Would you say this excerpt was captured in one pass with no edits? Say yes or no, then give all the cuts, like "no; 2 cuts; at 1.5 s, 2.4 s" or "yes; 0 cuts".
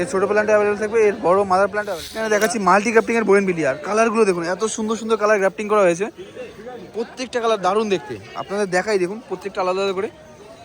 no; 1 cut; at 2.2 s